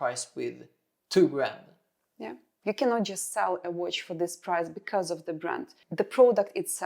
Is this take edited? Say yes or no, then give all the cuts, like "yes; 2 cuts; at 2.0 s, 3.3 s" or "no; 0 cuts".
yes; 2 cuts; at 2.4 s, 5.8 s